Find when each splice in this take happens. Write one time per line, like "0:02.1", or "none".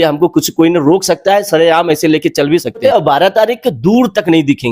0:02.8